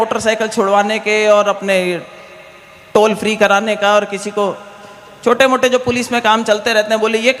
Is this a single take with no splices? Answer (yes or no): yes